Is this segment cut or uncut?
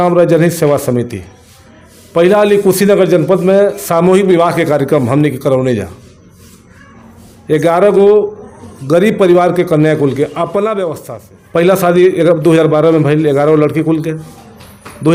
uncut